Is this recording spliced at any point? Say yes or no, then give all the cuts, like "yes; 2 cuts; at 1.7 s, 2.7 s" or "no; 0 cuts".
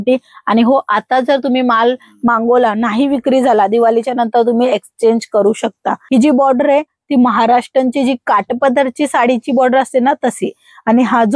yes; 1 cut; at 6.0 s